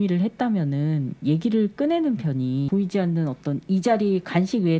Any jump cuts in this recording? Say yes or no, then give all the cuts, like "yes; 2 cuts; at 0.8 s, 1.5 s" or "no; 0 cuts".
no; 0 cuts